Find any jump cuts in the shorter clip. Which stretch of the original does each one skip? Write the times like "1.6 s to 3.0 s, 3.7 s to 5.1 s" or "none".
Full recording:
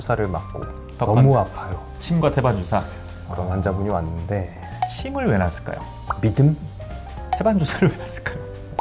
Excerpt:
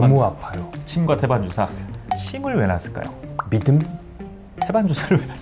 3.0 s to 4.6 s